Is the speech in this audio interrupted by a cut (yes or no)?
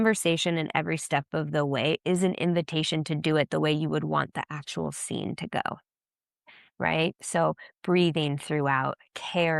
no